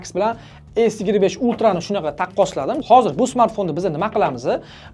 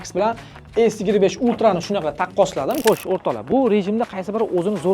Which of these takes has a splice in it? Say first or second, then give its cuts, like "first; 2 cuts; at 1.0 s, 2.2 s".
second; 1 cut; at 2.8 s